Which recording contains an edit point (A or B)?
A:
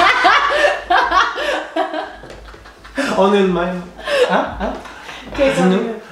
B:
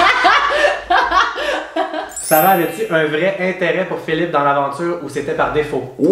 B